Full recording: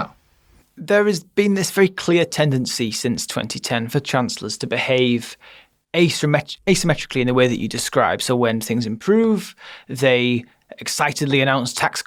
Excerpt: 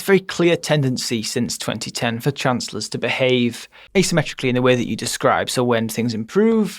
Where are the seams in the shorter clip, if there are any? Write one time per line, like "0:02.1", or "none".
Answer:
0:03.8